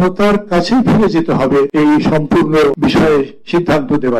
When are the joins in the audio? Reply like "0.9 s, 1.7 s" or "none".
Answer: 1.7 s, 2.8 s